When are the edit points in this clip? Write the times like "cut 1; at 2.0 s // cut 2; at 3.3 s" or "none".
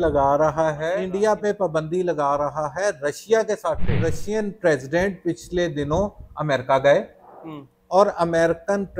cut 1; at 1.0 s // cut 2; at 4.2 s